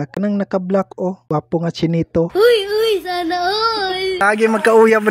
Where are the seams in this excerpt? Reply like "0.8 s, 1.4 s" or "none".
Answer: 4.2 s